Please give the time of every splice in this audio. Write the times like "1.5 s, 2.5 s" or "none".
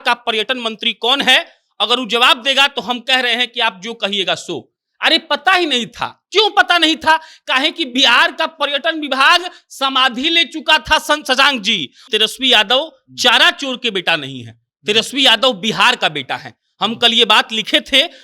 12.0 s

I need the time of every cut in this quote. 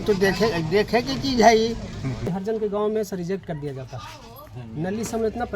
2.4 s

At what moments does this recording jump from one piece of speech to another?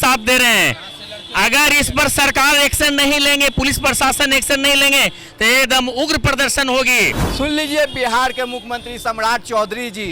7.2 s

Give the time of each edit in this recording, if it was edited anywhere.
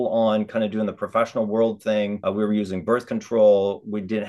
2.2 s

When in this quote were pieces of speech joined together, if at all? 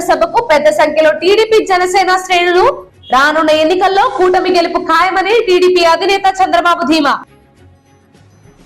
none

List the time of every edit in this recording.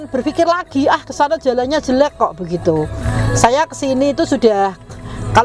none

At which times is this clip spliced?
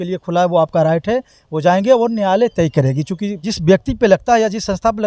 3.5 s

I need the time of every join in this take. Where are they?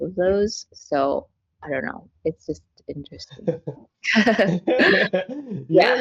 none

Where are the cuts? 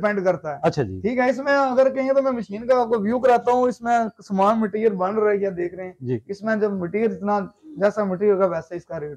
none

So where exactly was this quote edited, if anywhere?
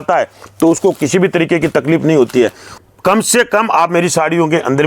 2.7 s

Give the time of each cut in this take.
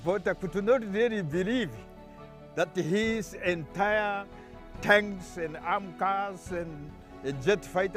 none

